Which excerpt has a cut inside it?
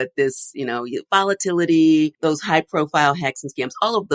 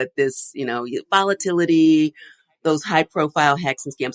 first; 1 cut; at 2.1 s

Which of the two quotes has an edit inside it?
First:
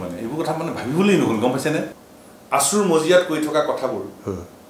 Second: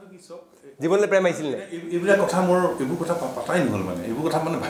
first; 1 cut; at 1.9 s

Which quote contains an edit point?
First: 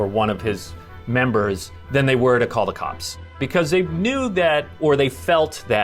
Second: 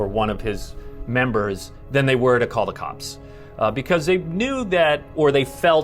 first; 1 cut; at 3.4 s

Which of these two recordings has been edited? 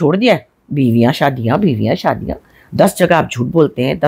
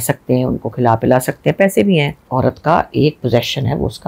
second; 1 cut; at 2.3 s

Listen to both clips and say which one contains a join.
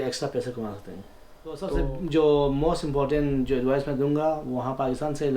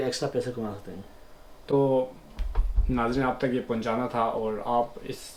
first; 1 cut; at 1.7 s

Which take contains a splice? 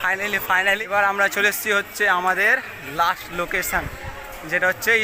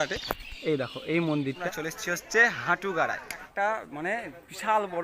second; 2 cuts; at 1.6 s, 3.5 s

